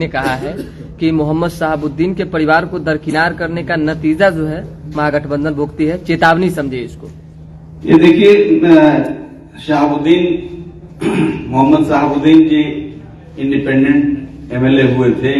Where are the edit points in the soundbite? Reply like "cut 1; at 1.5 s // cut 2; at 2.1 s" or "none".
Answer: none